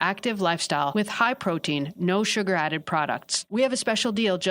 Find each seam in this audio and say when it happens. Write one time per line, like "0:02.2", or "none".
0:00.9